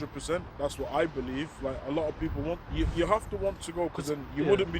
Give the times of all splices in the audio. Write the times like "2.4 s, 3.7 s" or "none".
none